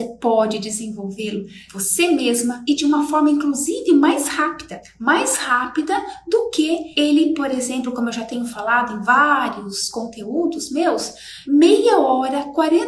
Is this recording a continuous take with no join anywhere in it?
yes; 0 cuts

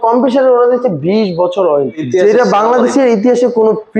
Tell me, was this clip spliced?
yes; 1 cut; at 2.0 s

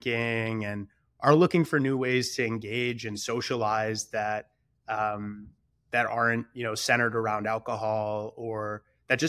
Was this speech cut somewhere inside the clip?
no; 0 cuts

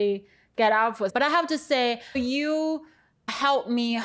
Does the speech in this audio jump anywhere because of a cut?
yes; 2 cuts; at 1.1 s, 2.2 s

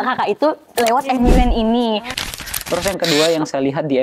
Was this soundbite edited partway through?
yes; 1 cut; at 2.3 s

